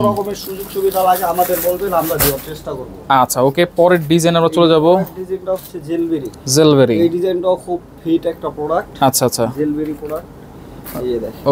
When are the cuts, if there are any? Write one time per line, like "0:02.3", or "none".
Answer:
none